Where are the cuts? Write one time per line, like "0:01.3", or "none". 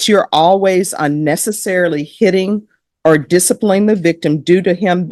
none